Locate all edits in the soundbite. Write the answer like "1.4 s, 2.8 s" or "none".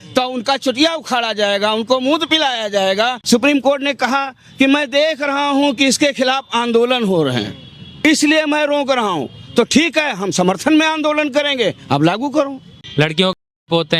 3.2 s, 12.8 s